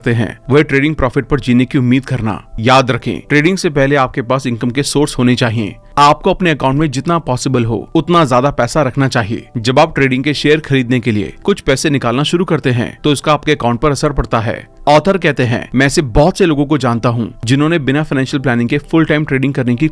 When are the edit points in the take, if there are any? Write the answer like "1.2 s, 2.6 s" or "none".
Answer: none

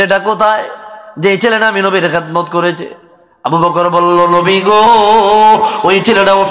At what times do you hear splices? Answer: none

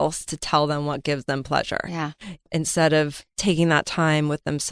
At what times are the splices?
2.5 s

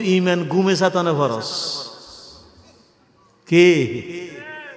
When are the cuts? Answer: none

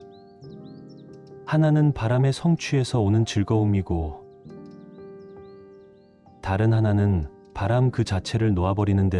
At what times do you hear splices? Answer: 1.3 s, 4.1 s, 6.4 s

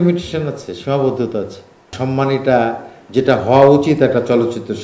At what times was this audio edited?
1.9 s

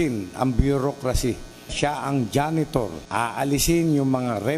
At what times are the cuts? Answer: 1.7 s, 3.0 s

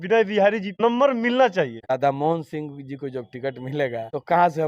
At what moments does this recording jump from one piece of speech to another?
1.9 s

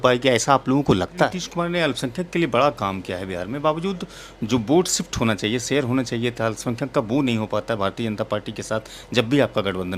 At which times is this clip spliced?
1.4 s

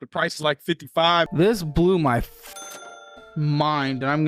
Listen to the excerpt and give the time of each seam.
1.3 s

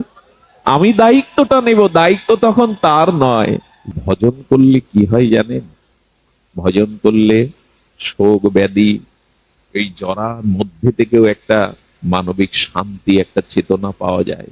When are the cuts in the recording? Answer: 3.8 s

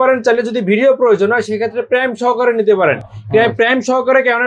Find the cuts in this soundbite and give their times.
none

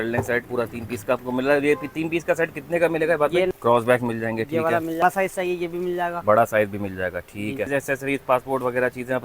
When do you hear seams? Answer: 3.5 s, 5.0 s, 7.7 s

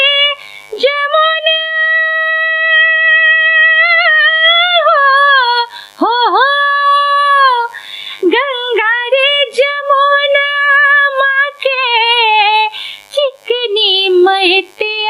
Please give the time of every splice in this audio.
none

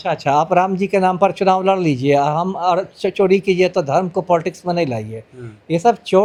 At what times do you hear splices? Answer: none

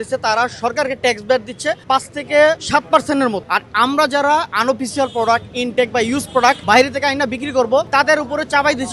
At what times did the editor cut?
1.8 s, 2.6 s, 3.4 s, 6.6 s, 7.9 s

